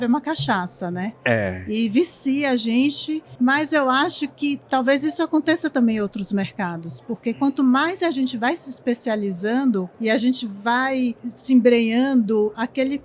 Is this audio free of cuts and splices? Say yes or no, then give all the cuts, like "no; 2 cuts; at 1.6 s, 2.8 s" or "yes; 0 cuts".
yes; 0 cuts